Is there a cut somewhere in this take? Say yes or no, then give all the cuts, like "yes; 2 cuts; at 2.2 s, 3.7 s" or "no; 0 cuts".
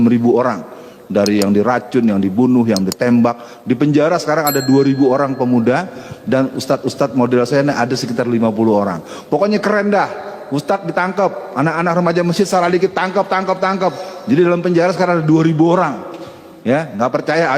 no; 0 cuts